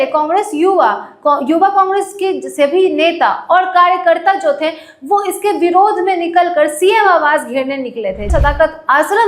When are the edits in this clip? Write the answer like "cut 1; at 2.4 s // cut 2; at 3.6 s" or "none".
cut 1; at 8.3 s

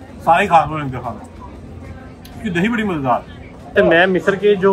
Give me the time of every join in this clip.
cut 1; at 3.7 s

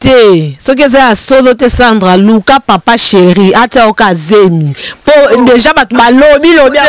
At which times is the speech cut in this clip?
none

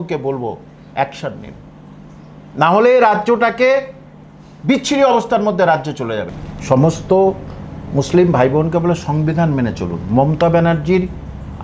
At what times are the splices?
cut 1; at 6.3 s

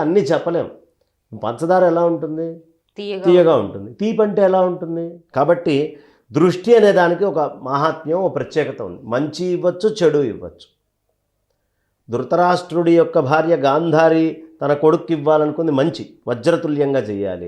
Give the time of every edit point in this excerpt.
cut 1; at 5.2 s

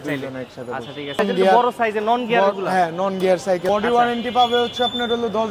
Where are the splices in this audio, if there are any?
cut 1; at 1.2 s // cut 2; at 3.6 s

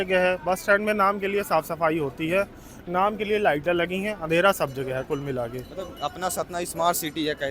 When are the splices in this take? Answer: none

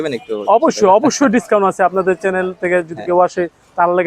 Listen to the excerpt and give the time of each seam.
none

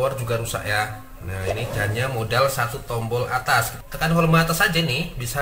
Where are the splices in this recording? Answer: cut 1; at 3.7 s

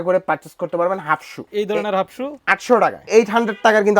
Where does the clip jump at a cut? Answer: cut 1; at 1.4 s // cut 2; at 2.6 s

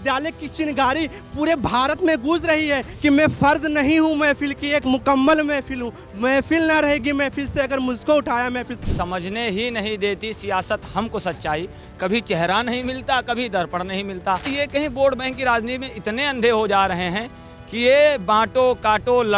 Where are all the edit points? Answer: cut 1; at 2.9 s // cut 2; at 8.8 s // cut 3; at 14.5 s

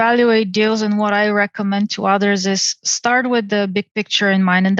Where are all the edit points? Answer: none

